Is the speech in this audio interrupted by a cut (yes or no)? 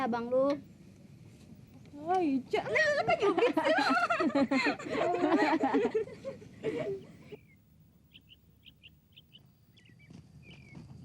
yes